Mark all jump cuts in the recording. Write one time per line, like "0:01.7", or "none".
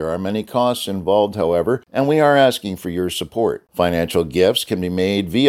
0:01.9